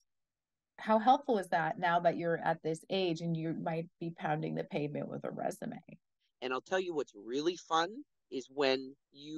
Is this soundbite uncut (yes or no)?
no